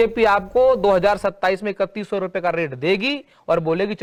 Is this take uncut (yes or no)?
yes